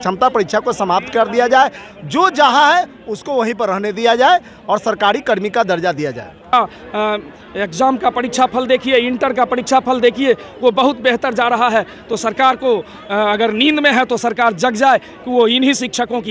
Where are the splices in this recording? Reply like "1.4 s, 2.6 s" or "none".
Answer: 6.5 s